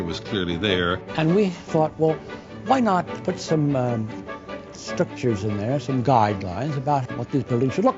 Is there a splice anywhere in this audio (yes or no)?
yes